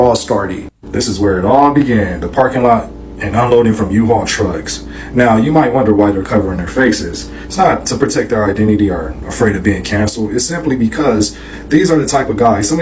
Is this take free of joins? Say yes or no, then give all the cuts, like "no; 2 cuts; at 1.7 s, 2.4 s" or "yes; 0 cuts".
no; 1 cut; at 8.8 s